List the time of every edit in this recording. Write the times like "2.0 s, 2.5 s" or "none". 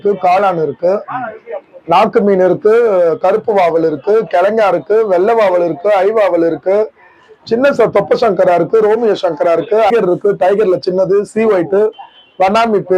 9.9 s